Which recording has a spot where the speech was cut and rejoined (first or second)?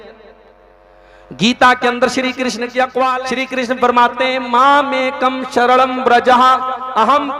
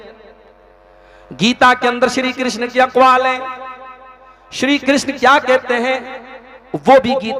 first